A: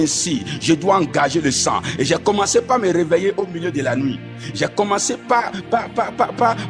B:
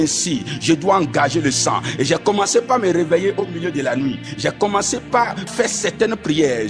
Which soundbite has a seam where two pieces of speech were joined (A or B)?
B